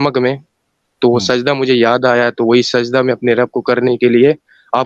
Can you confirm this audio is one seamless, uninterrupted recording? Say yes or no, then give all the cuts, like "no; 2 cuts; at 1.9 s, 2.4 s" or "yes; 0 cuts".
yes; 0 cuts